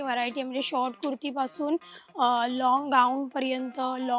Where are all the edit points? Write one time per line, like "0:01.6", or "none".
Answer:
none

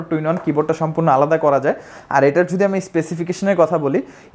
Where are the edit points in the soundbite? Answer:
none

